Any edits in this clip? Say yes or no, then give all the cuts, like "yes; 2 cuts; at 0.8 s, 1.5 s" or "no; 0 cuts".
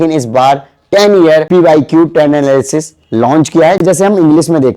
yes; 1 cut; at 3.8 s